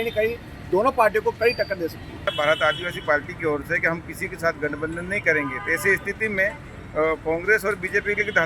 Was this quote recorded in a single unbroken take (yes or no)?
no